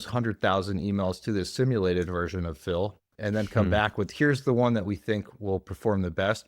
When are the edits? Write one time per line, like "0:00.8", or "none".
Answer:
0:03.1